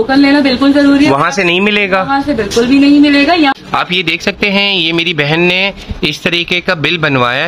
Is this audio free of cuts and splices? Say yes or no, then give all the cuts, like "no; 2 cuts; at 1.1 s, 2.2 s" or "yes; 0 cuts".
no; 1 cut; at 3.5 s